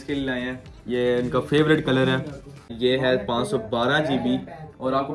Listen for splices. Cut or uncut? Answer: cut